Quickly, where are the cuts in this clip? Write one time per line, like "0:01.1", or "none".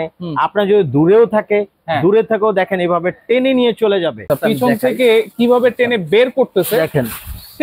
0:04.3